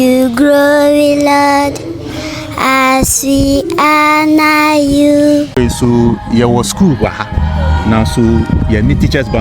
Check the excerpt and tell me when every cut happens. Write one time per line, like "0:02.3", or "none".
0:05.5